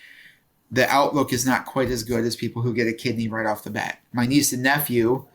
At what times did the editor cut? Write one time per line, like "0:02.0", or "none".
0:04.1

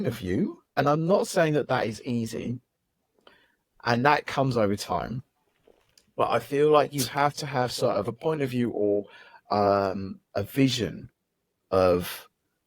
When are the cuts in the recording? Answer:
none

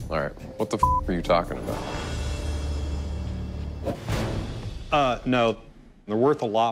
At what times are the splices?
0:04.0
0:05.8

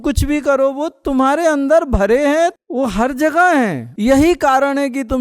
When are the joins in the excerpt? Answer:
0:02.6
0:03.9

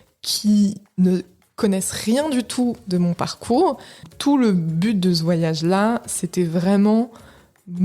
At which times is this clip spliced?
0:04.0

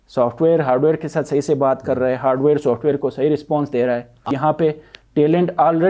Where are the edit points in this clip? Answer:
0:04.3

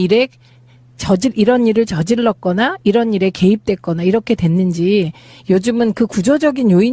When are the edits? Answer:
0:02.1

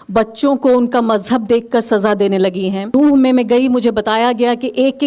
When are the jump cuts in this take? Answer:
0:02.9

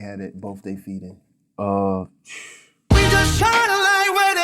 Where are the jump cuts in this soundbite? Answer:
0:02.8

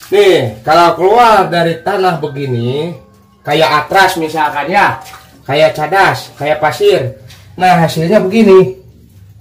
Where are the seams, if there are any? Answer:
none

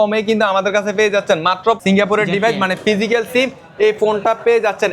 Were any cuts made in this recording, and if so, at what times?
0:01.8

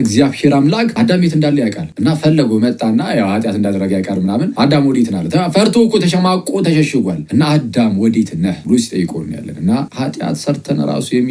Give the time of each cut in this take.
0:00.9
0:01.9
0:04.5
0:07.2
0:08.6
0:09.9

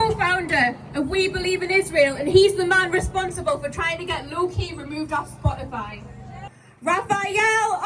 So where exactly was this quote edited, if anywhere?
0:06.3

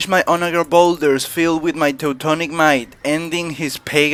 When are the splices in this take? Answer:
none

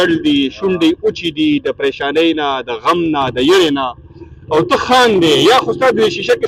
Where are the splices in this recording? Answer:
none

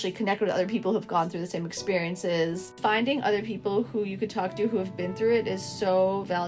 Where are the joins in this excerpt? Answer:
0:02.8

